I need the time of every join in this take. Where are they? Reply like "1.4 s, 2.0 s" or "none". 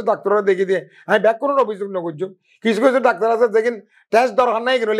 none